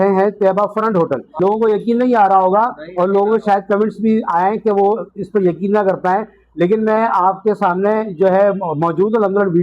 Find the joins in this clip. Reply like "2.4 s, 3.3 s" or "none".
1.3 s